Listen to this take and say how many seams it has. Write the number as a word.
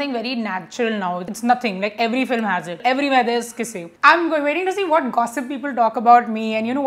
three